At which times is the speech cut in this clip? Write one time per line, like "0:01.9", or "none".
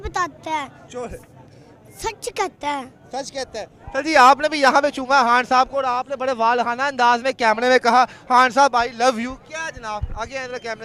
none